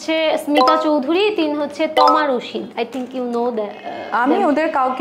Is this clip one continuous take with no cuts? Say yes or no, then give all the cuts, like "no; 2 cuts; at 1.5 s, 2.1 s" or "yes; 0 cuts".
yes; 0 cuts